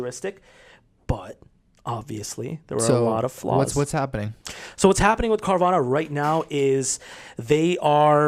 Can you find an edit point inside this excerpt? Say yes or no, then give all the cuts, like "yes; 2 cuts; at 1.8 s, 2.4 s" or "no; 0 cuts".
no; 0 cuts